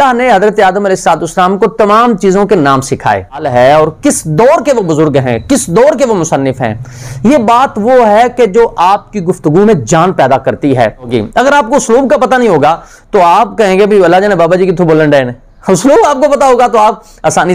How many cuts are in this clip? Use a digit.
2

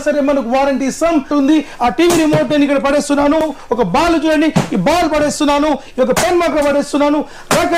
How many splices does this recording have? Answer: 2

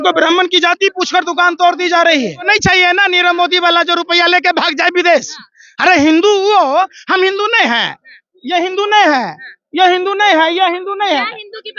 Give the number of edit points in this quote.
1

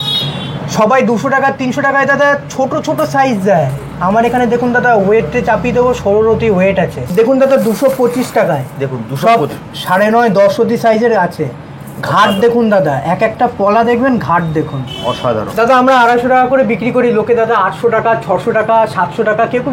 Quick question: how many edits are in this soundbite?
2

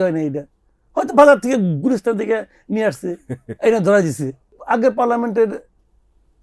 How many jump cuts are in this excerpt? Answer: 1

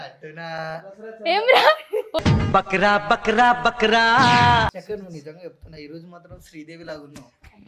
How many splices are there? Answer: 1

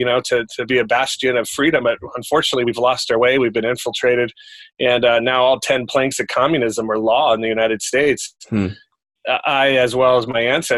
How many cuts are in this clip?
0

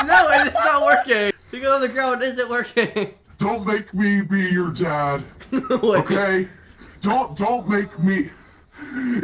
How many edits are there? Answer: 1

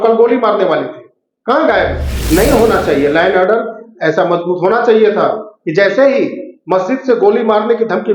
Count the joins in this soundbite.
1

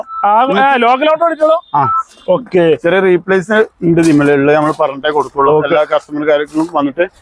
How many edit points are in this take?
0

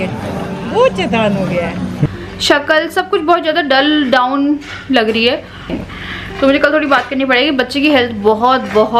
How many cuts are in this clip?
2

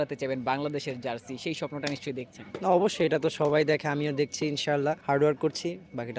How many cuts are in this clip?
2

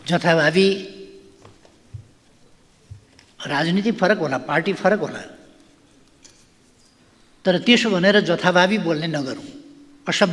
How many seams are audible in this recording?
0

